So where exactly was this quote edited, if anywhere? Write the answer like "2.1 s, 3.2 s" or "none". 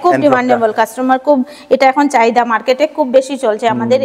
none